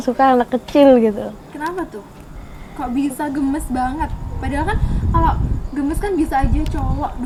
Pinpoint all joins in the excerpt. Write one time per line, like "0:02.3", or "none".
none